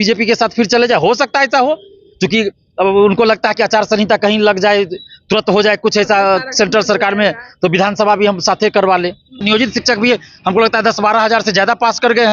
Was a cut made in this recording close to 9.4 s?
yes; 1 cut; at 9.4 s

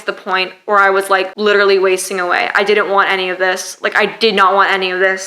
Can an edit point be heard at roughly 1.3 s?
yes; 1 cut; at 1.3 s

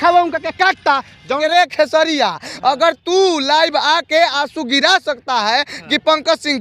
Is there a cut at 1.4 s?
yes; 1 cut; at 1.4 s

